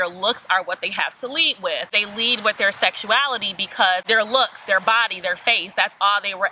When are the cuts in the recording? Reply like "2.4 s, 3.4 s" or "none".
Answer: 2.0 s, 4.0 s